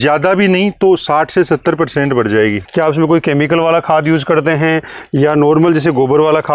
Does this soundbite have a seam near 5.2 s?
no; 1 cut; at 2.6 s

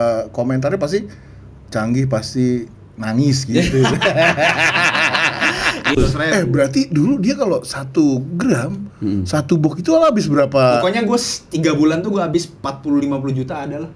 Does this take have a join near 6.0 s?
yes; 1 cut; at 6.0 s

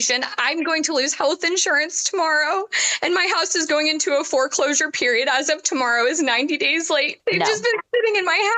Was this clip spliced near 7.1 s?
yes; 1 cut; at 7.1 s

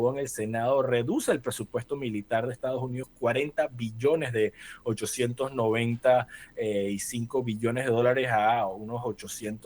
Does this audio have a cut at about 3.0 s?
yes; 1 cut; at 3.0 s

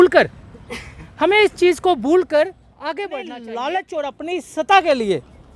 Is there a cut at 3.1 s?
yes; 1 cut; at 3.1 s

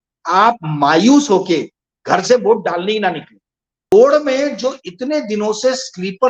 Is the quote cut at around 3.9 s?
yes; 1 cut; at 3.9 s

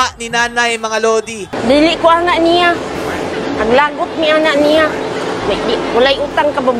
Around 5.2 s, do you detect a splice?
no; 1 cut; at 1.5 s

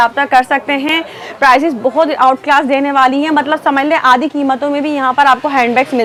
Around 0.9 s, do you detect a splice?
no; 0 cuts

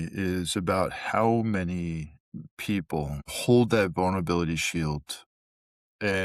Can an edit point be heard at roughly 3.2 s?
no; 0 cuts

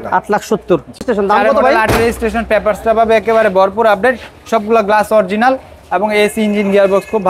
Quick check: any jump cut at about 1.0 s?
yes; 1 cut; at 1.0 s

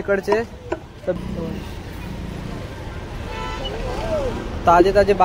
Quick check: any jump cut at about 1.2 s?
yes; 1 cut; at 1.2 s

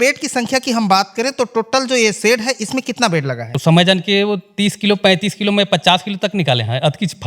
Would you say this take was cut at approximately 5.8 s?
no; 1 cut; at 3.6 s

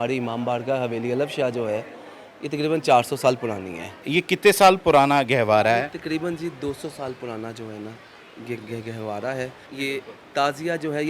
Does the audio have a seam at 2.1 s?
no; 2 cuts; at 4.0 s, 9.6 s

